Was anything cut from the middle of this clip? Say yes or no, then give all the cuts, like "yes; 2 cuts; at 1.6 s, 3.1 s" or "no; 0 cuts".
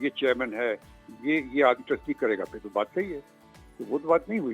no; 0 cuts